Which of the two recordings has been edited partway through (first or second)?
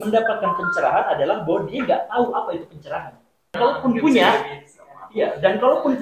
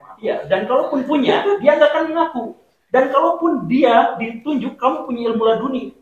first